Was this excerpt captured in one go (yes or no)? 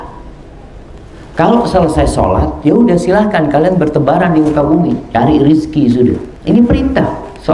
no